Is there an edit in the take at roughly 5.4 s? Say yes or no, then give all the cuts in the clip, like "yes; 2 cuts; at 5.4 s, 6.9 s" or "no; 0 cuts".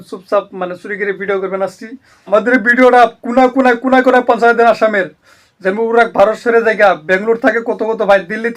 no; 1 cut; at 2.1 s